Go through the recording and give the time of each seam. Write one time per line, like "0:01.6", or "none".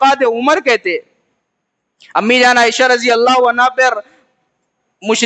none